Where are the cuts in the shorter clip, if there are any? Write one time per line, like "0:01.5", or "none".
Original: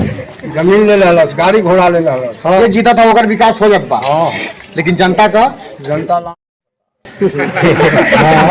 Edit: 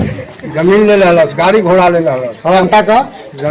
0:02.6